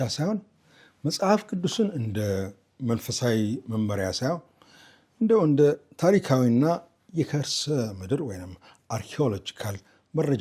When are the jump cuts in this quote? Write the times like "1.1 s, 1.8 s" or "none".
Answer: none